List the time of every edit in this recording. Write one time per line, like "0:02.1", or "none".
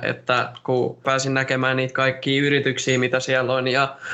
0:01.0